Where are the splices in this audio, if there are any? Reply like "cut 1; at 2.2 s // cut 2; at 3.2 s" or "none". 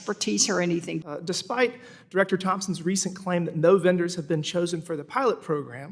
cut 1; at 1.0 s